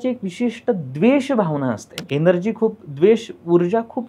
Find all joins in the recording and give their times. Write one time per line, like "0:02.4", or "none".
0:01.9